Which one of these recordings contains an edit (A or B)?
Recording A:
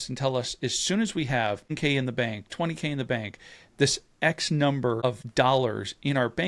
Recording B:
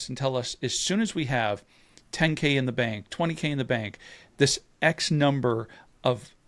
A